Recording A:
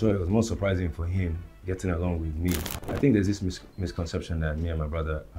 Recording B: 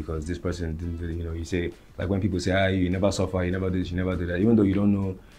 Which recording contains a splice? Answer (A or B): A